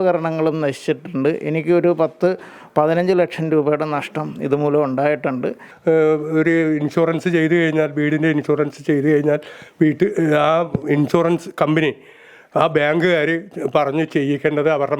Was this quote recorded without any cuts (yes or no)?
no